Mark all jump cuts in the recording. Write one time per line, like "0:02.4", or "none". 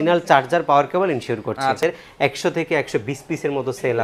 0:01.8